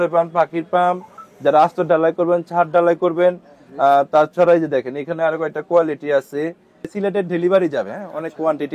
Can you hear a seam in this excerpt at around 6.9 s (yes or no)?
yes